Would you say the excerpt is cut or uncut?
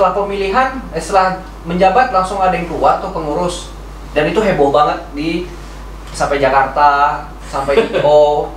uncut